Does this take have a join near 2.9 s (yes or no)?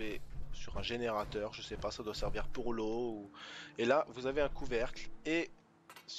no